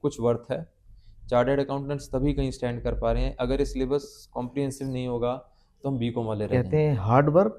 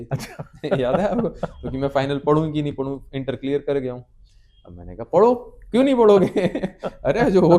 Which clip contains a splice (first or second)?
first